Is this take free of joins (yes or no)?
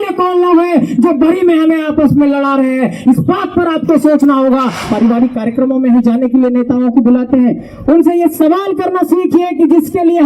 no